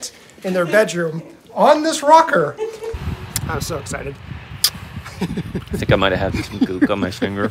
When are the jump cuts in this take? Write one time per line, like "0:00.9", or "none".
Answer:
0:02.8